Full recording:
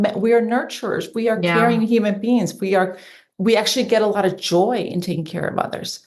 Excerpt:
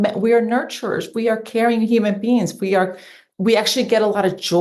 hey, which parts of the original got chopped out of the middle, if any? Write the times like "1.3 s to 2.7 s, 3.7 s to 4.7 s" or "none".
none